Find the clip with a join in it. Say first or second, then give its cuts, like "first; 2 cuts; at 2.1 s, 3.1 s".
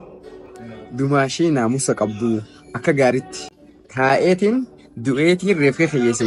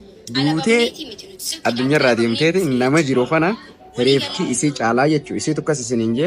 first; 1 cut; at 3.4 s